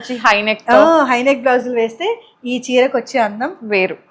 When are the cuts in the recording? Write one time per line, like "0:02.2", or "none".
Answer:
none